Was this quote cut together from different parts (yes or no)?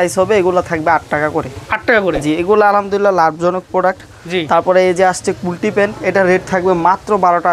no